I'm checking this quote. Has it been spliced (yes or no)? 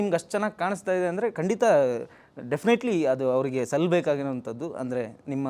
no